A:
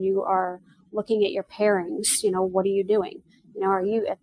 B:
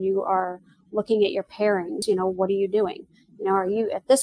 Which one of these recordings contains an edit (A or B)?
B